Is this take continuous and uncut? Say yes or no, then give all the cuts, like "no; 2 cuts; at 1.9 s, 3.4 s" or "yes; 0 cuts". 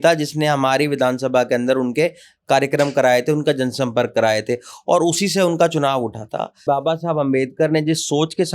no; 1 cut; at 6.6 s